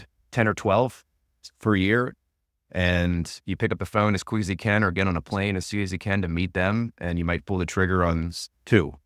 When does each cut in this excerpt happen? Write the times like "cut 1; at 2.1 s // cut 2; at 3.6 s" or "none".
none